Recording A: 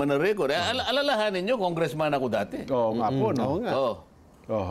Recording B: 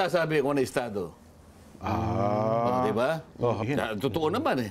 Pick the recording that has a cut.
B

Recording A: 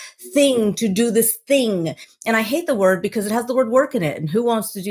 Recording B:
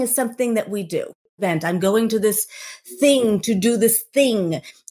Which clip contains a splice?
B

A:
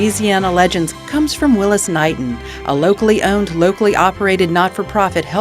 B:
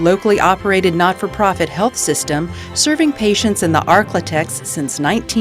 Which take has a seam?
A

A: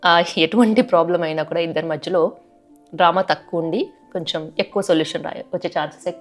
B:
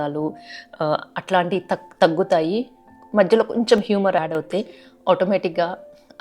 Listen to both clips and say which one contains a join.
B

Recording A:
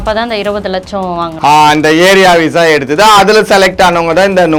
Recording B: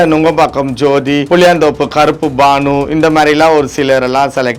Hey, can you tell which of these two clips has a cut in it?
B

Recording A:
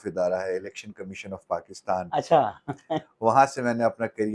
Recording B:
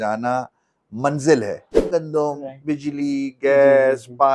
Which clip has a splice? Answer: B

